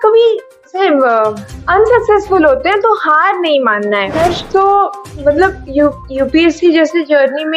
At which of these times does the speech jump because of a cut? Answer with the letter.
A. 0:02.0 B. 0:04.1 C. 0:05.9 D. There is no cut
B